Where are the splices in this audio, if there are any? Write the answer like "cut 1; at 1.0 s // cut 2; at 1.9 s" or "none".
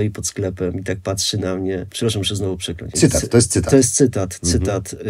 cut 1; at 2.9 s